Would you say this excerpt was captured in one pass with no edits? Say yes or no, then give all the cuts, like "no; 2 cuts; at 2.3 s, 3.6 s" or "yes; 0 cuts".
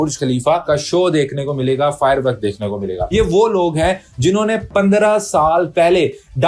no; 1 cut; at 3.0 s